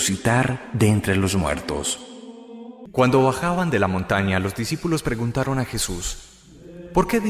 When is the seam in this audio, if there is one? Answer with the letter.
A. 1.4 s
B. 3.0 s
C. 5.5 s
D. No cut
C